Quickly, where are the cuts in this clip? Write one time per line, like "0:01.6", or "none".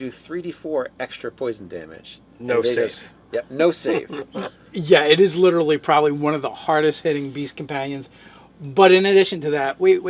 0:01.8